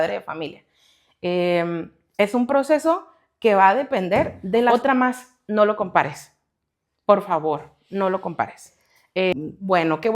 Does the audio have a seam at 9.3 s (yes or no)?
yes